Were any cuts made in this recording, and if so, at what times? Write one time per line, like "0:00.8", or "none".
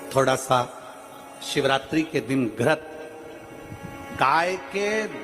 none

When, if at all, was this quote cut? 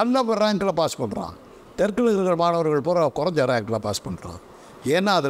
none

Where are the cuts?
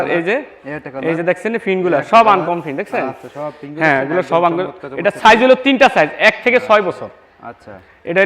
none

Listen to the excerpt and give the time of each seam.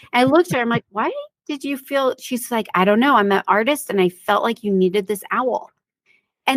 none

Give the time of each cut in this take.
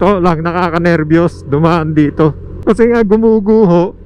0:02.6

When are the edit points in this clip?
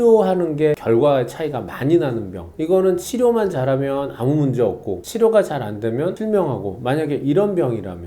none

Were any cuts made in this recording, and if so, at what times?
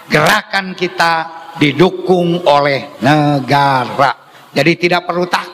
none

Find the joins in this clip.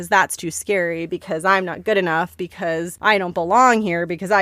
0:02.6

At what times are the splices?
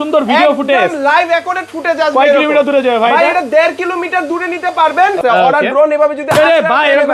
0:05.2

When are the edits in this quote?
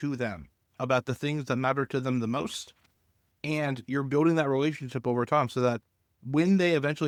none

